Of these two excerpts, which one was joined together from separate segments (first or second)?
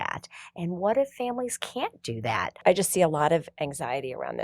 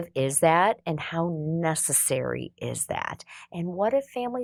first